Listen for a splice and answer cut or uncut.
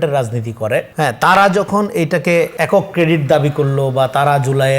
cut